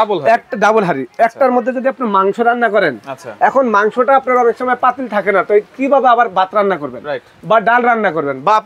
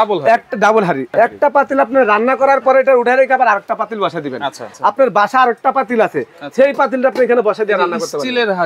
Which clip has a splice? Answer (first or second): second